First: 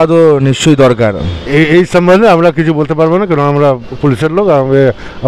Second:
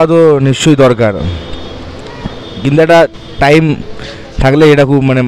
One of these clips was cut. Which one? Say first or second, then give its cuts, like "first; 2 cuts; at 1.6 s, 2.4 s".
first; 1 cut; at 1.3 s